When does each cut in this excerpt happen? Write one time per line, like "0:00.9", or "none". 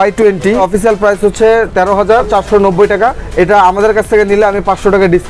0:02.3
0:03.2